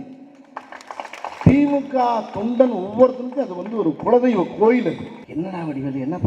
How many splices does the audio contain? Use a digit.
2